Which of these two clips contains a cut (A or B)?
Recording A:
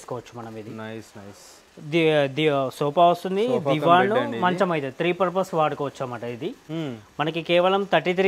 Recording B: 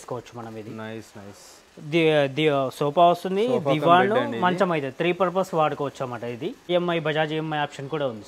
B